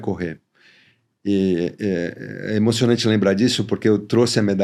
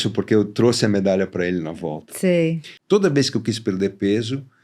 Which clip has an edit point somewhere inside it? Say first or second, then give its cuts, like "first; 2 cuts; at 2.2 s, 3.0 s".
second; 1 cut; at 2.7 s